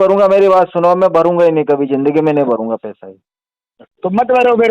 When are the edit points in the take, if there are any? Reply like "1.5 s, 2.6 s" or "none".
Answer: none